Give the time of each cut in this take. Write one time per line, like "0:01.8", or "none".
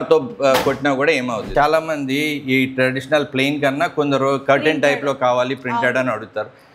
0:01.5